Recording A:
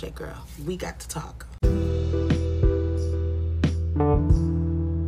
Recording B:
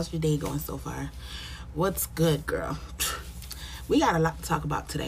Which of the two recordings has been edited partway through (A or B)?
A